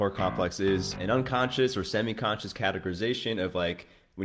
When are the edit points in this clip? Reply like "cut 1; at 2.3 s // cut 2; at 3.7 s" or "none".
cut 1; at 0.9 s